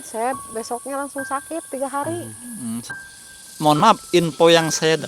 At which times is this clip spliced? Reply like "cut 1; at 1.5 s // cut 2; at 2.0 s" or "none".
cut 1; at 2.9 s